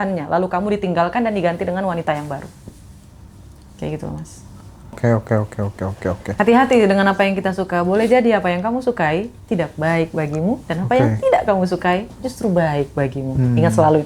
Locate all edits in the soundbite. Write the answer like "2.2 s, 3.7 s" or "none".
5.0 s